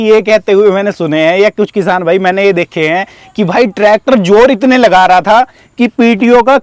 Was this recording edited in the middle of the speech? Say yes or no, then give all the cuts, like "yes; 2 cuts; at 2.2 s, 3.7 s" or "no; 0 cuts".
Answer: no; 0 cuts